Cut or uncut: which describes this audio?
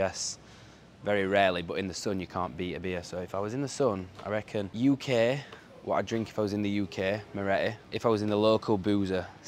cut